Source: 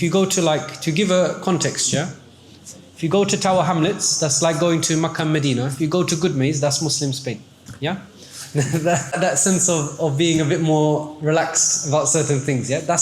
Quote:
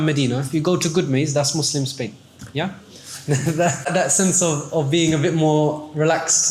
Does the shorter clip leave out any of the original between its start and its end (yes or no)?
no